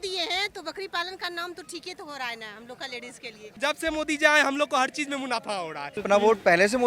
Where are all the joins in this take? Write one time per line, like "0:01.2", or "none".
0:03.6
0:06.0